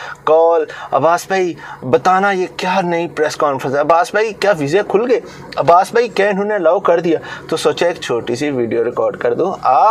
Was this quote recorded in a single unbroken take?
yes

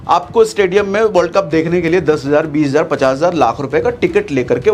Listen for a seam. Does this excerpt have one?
no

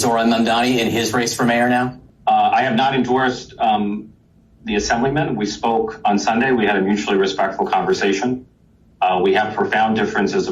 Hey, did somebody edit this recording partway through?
yes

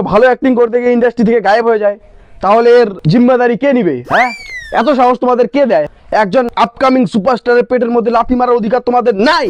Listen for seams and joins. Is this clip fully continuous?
no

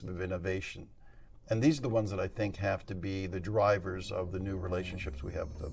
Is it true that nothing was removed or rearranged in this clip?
yes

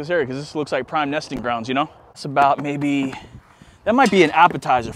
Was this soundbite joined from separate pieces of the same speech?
yes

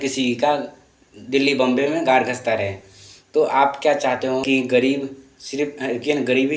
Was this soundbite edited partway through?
no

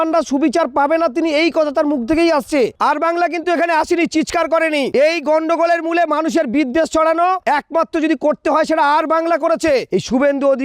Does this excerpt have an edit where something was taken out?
yes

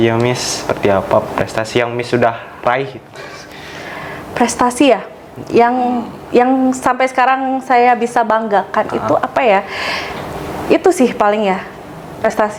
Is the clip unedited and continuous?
yes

